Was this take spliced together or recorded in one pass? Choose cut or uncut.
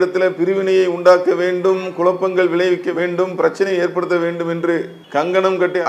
cut